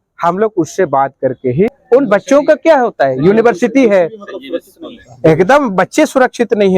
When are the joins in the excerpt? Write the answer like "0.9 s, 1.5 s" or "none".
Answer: 1.8 s